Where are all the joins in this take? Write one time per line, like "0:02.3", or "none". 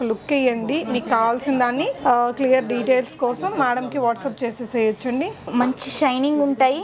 0:05.5